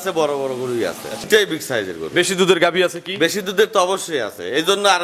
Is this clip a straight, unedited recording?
no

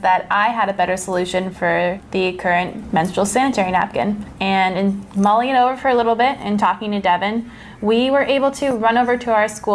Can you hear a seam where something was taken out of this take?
no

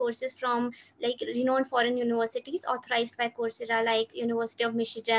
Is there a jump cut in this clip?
no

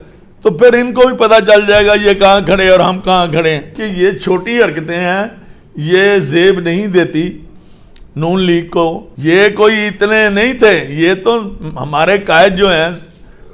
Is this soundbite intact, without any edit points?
no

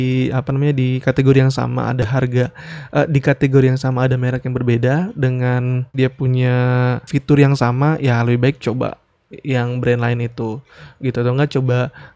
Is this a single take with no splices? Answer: no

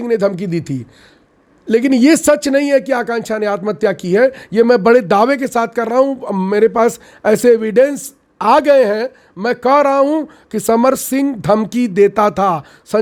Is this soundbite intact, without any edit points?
yes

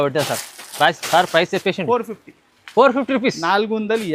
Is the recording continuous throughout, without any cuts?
yes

